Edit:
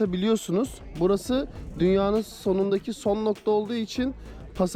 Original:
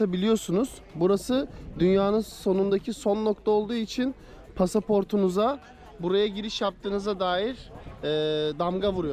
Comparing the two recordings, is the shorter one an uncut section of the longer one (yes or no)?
yes